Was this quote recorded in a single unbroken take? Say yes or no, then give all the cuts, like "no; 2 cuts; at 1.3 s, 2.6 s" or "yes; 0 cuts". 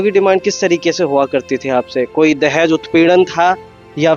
yes; 0 cuts